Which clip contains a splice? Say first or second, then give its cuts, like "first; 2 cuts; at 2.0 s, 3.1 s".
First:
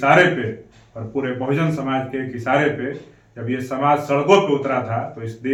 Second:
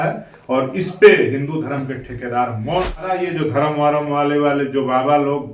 second; 1 cut; at 3.2 s